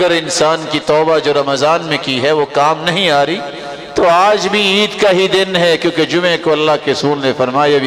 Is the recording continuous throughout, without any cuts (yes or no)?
yes